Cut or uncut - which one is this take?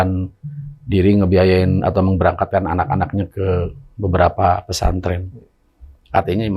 uncut